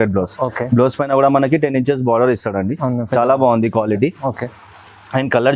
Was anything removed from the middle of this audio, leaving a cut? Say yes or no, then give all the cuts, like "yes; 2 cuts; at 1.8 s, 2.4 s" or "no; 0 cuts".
no; 0 cuts